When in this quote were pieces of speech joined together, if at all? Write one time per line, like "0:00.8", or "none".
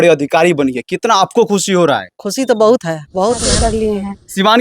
0:03.7

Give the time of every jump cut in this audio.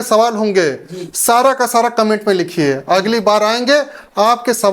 none

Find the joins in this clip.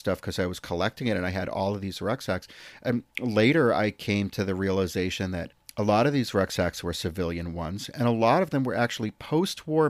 0:05.6

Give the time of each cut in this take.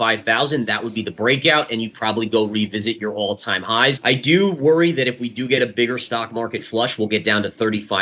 0:04.0

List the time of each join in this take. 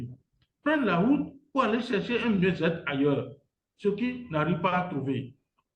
none

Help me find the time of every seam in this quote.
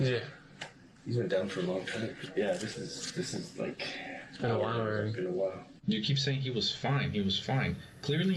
0:02.1
0:05.7

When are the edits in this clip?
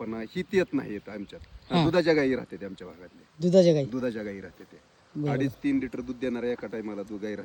none

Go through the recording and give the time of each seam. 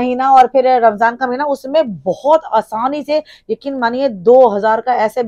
none

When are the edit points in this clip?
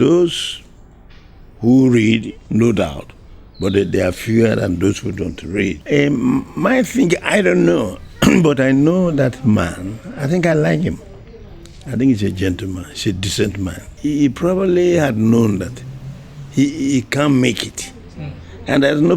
0:05.8
0:13.9

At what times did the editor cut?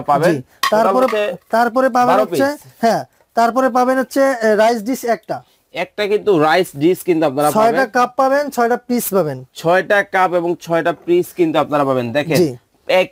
none

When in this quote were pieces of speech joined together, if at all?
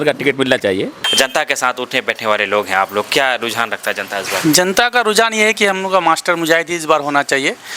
0:01.0

